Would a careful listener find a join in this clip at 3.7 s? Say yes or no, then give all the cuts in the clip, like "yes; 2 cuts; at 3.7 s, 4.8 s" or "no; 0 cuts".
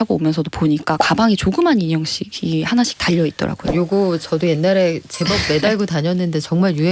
yes; 1 cut; at 3.7 s